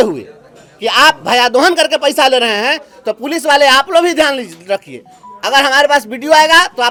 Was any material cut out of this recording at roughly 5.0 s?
no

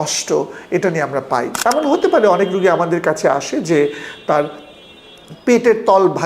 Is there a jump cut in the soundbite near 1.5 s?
yes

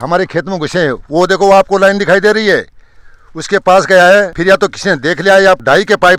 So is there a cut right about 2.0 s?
no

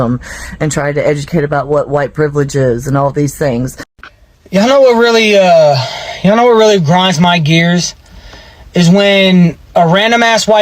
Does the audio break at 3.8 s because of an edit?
yes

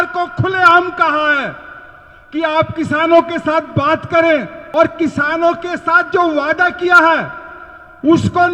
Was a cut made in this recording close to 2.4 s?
no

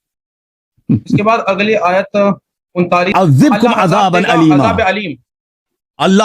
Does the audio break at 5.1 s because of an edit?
no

